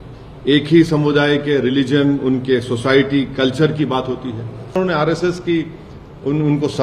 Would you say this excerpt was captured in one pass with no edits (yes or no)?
no